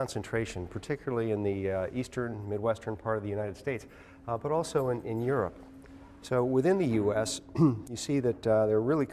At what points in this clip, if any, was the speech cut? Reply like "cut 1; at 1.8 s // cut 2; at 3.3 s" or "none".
cut 1; at 4.9 s